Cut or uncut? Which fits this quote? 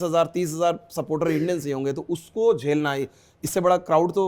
uncut